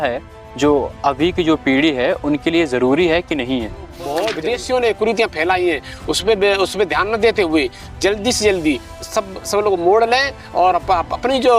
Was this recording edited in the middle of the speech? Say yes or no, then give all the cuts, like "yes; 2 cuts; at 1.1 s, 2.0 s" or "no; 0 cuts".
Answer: yes; 1 cut; at 4.3 s